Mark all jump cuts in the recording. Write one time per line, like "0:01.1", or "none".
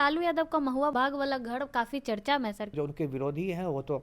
0:00.9
0:02.7